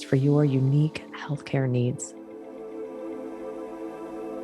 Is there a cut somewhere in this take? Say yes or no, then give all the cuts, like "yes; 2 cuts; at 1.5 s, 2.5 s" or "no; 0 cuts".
yes; 1 cut; at 2.1 s